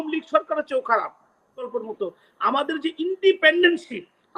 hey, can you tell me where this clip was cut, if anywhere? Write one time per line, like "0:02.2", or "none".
0:01.7